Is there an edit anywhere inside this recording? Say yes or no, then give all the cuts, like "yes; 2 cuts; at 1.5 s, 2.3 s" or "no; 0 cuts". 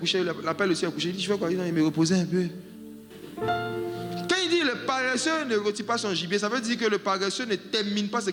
no; 0 cuts